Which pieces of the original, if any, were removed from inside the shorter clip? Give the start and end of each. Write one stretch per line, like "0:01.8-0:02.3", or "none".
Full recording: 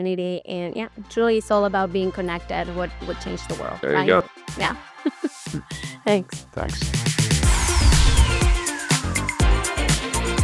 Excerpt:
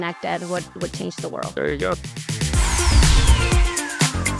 0:04.5-0:07.1